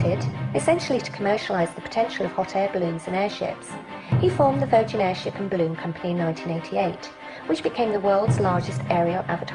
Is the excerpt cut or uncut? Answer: cut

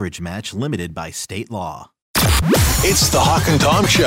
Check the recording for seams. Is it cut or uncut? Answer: cut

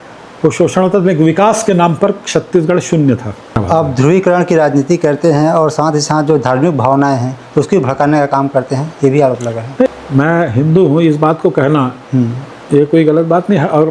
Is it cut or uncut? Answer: cut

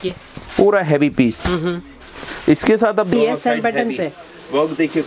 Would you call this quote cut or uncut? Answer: cut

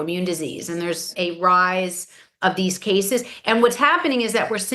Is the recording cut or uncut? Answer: cut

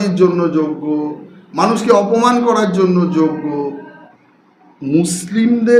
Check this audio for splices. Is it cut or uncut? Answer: cut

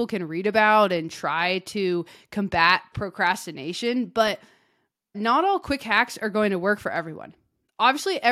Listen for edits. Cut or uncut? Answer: cut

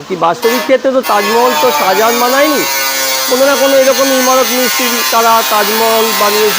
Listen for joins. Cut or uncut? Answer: uncut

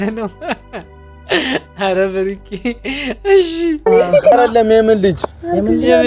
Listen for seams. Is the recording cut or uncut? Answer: uncut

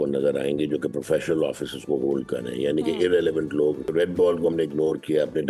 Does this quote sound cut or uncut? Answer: cut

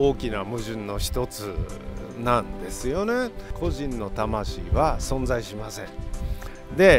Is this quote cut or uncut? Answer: cut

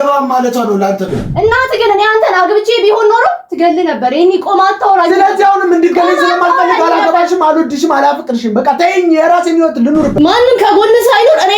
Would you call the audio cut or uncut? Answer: cut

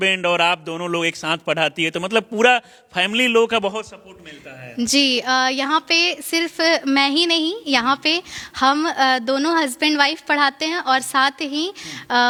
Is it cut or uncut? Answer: uncut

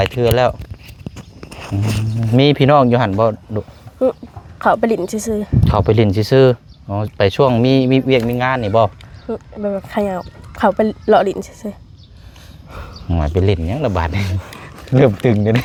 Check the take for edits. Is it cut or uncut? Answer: uncut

